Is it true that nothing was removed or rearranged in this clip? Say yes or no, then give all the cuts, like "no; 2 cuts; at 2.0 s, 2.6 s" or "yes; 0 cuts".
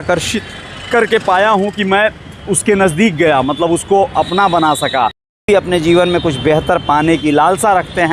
no; 1 cut; at 5.4 s